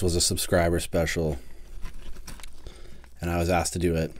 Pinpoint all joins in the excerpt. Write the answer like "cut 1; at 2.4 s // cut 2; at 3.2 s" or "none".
none